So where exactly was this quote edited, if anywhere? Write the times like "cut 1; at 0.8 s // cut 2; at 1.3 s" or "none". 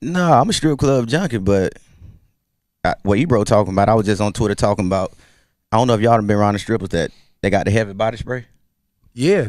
cut 1; at 5.2 s

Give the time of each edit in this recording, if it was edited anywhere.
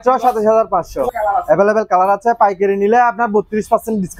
cut 1; at 1.1 s

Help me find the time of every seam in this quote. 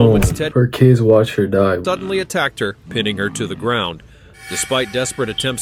none

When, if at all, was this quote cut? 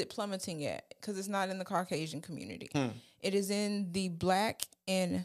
none

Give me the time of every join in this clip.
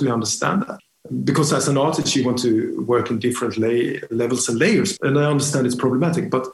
cut 1; at 0.8 s // cut 2; at 4.9 s

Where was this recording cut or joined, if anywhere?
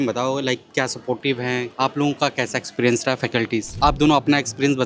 cut 1; at 1.7 s // cut 2; at 3.8 s

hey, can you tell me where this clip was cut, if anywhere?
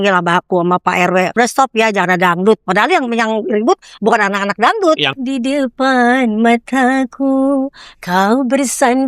cut 1; at 1.3 s // cut 2; at 5.2 s

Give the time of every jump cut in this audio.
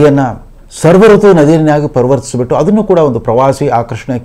none

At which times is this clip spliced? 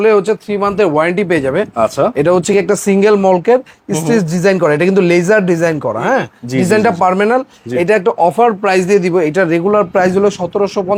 none

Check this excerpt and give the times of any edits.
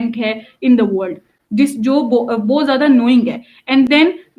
none

